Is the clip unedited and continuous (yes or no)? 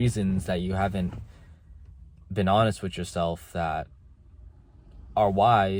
yes